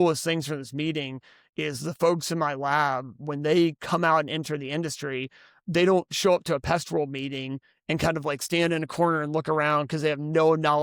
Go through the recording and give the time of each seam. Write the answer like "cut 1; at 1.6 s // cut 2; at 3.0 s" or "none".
none

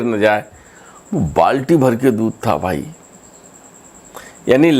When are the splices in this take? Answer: none

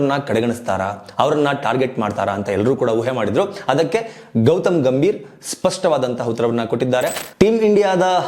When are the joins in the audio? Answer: cut 1; at 7.2 s

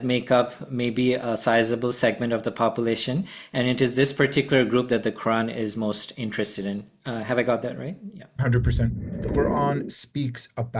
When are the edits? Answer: cut 1; at 9.1 s

